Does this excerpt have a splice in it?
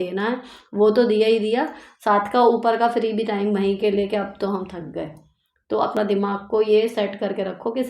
yes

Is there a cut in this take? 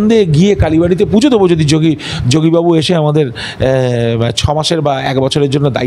no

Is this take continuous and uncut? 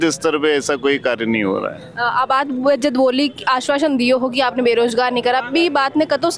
yes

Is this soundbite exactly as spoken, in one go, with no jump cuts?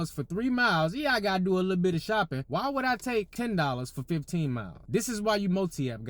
no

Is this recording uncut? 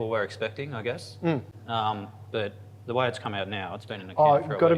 yes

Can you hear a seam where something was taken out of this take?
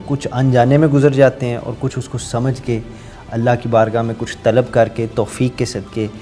no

